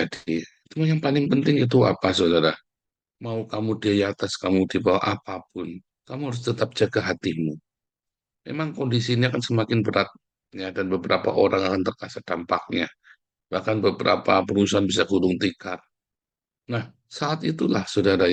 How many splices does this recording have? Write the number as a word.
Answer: zero